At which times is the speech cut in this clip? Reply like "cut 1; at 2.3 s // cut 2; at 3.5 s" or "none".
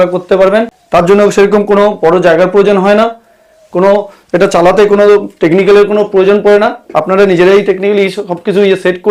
none